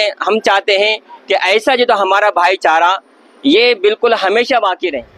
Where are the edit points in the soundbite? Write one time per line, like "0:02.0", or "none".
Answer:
none